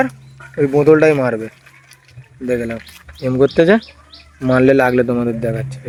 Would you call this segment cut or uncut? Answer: uncut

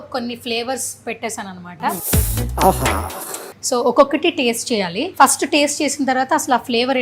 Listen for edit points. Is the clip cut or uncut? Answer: cut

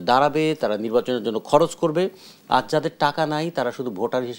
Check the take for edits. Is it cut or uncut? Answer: uncut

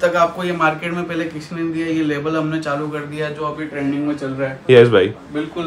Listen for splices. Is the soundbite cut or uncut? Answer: uncut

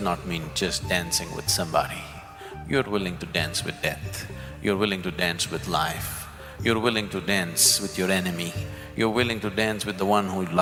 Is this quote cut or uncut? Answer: uncut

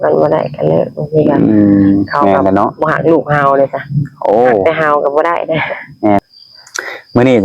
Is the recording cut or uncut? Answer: cut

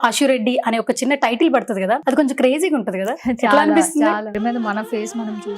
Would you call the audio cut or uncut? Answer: cut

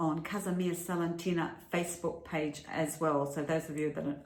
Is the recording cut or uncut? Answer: uncut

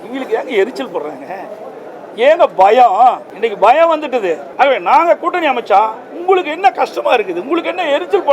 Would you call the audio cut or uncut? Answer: cut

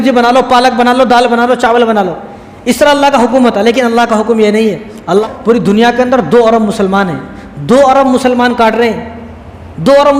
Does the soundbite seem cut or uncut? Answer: cut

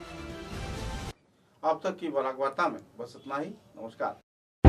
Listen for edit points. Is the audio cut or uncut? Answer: uncut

